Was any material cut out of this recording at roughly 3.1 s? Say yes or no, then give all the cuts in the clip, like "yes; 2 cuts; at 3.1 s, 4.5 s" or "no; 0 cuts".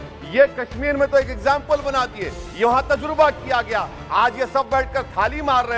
yes; 1 cut; at 3.1 s